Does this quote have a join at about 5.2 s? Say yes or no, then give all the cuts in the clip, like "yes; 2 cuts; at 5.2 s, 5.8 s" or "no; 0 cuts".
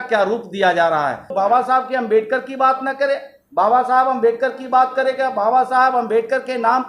no; 1 cut; at 1.3 s